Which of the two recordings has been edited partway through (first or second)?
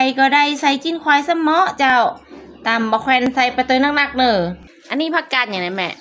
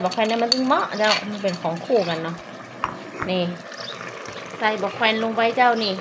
first